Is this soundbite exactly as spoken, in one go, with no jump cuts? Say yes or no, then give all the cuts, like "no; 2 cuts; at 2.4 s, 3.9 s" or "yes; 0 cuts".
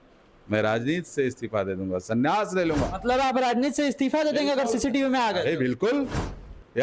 yes; 0 cuts